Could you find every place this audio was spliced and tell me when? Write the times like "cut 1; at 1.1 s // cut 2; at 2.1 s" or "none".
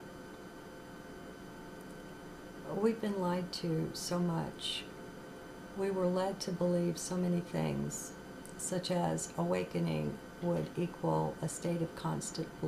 cut 1; at 4.9 s